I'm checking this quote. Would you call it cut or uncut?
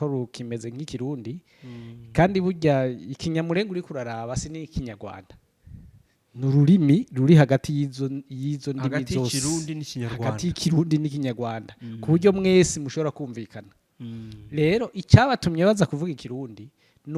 uncut